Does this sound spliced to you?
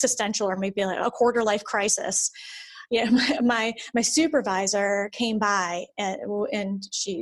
no; 0 cuts

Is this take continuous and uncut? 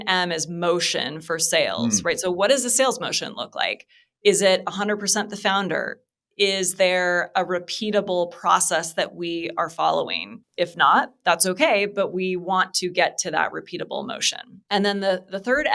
yes; 0 cuts

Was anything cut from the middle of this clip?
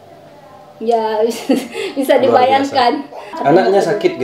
yes; 1 cut; at 3.2 s

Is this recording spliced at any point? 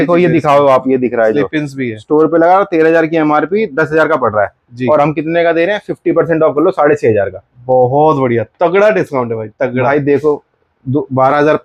no; 0 cuts

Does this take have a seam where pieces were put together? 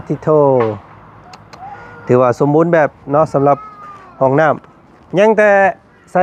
no; 0 cuts

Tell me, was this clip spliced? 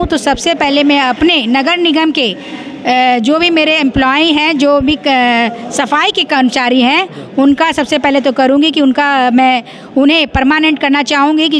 no; 0 cuts

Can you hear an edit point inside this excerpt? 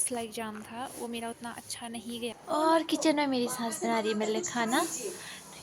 yes; 1 cut; at 2.4 s

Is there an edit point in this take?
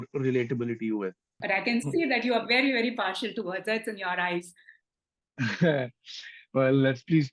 yes; 1 cut; at 1.3 s

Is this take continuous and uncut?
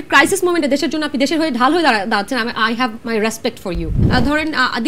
no; 1 cut; at 4.0 s

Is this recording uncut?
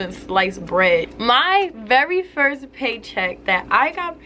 no; 1 cut; at 1.1 s

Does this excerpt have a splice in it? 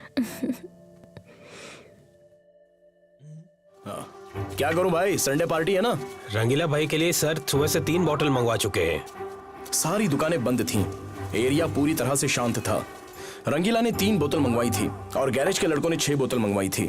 yes; 1 cut; at 4.0 s

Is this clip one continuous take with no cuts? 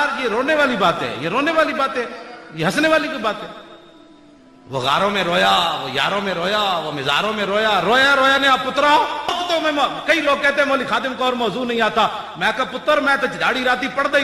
no; 1 cut; at 9.3 s

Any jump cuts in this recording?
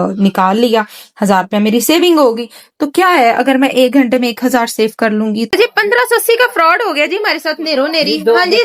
yes; 1 cut; at 5.5 s

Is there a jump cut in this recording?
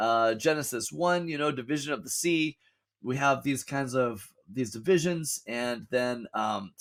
no; 0 cuts

